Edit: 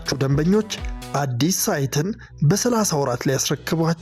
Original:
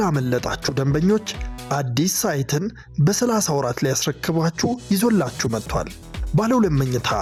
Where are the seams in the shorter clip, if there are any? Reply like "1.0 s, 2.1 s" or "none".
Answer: none

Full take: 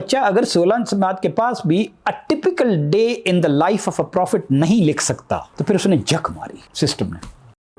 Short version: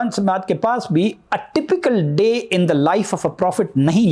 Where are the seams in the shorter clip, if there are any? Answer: none

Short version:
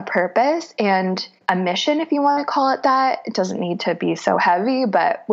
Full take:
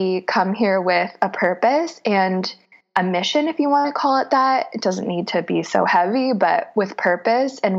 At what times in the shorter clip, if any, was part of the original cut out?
1.3 s

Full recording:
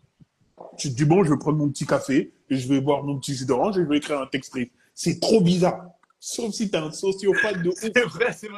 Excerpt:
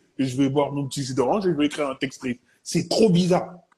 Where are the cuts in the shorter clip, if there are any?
none

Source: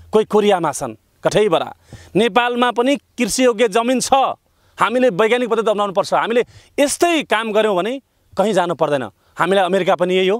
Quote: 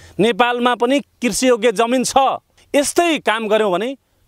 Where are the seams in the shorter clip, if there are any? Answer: 2.6 s

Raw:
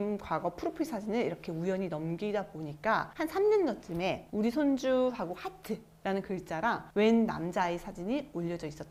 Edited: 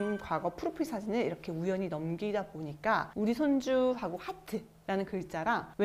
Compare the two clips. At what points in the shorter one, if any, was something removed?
3.1 s

